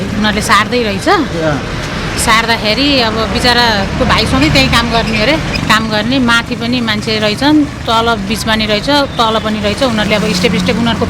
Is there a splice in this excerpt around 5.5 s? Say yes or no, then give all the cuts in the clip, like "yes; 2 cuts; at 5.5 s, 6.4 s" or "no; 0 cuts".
yes; 1 cut; at 5.5 s